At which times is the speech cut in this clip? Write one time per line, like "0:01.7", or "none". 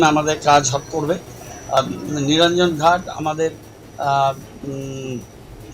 0:01.8

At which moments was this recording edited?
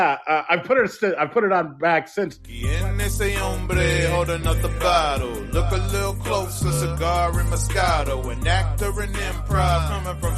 0:02.6

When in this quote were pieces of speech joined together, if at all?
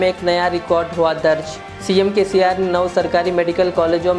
none

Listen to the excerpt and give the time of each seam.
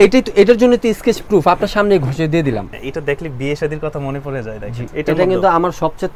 0:02.7
0:04.8

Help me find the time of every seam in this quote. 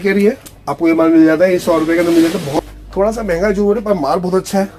0:02.5

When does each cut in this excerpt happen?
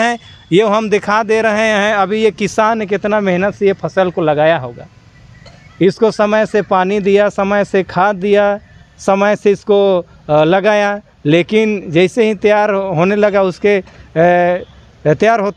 none

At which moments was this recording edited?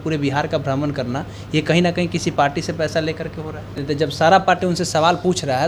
0:03.8

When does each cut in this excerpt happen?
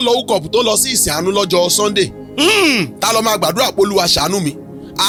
none

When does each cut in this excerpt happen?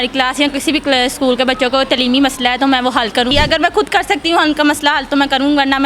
0:03.3

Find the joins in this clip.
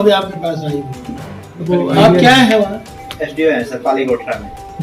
0:01.6

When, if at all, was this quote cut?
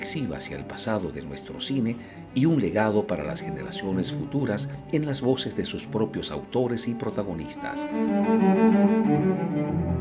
none

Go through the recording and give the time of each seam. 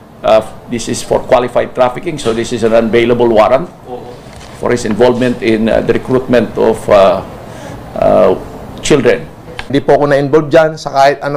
none

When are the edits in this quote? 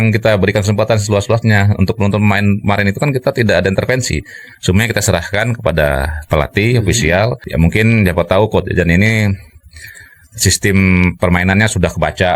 0:07.4

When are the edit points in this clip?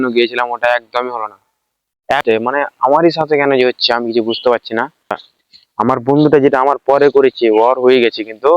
0:02.2
0:05.3

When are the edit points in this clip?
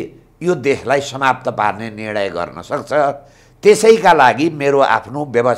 none

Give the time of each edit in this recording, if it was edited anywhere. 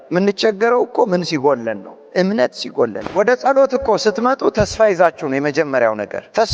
0:03.0

